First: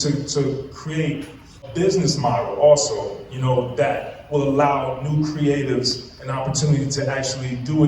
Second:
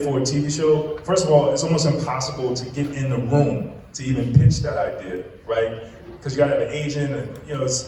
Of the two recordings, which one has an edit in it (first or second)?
first